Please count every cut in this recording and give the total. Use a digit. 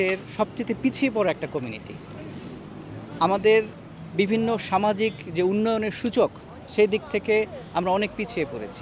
0